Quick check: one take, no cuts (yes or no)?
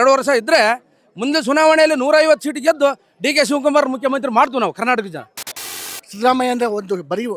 no